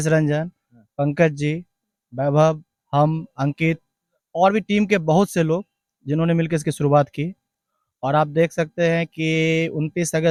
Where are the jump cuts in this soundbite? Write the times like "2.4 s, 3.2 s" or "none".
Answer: none